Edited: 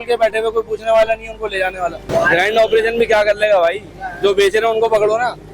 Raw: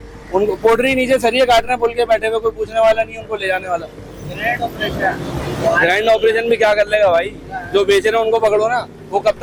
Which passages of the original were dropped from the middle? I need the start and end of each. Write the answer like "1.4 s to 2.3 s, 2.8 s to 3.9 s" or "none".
3.9 s to 5.5 s